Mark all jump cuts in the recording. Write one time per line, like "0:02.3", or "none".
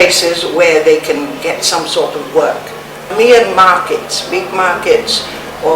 0:03.0